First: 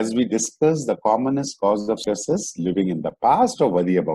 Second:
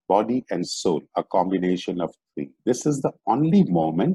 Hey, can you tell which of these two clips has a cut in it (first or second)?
second